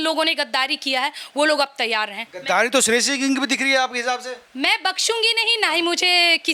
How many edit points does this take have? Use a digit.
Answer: 0